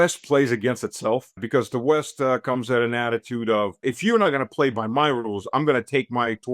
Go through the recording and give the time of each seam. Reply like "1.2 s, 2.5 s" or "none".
1.4 s, 3.8 s